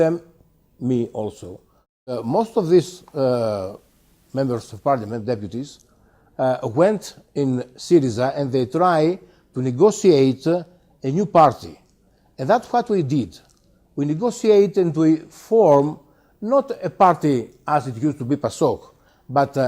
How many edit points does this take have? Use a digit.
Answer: 1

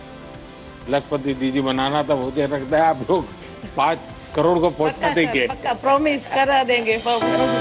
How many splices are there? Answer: 0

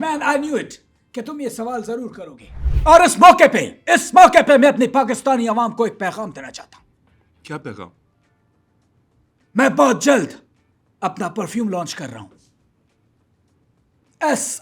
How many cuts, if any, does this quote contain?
1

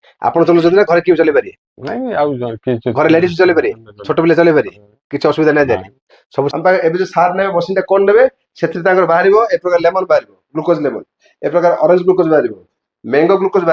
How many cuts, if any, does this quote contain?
1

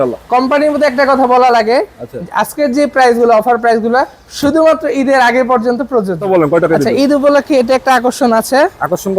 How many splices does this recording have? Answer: 1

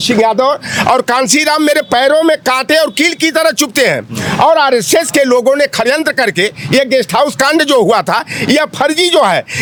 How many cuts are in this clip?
0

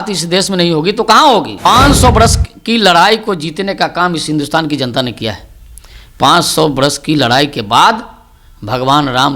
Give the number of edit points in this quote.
1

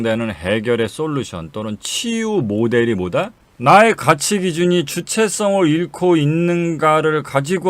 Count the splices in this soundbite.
1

